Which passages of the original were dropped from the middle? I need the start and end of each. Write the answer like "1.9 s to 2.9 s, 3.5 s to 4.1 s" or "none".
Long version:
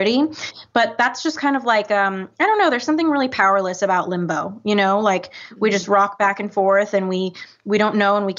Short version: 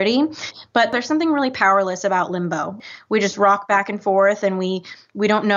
0.9 s to 2.7 s, 4.6 s to 5.3 s